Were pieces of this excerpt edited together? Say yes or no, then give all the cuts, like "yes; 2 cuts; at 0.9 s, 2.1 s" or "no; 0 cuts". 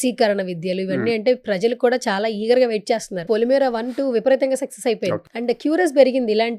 yes; 2 cuts; at 3.3 s, 5.3 s